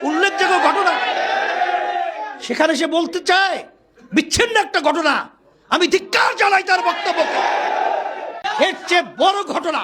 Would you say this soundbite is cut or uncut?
cut